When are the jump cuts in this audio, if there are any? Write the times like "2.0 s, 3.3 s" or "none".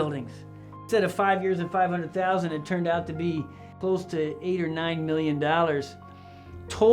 0.8 s, 3.7 s